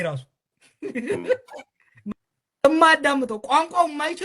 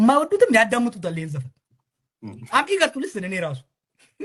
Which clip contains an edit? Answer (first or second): first